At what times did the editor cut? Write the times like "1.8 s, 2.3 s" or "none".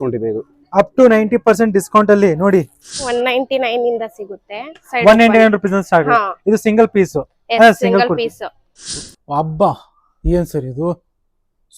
3.1 s, 9.0 s